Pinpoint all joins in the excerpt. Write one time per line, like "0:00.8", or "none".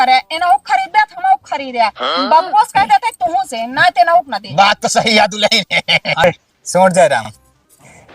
0:06.2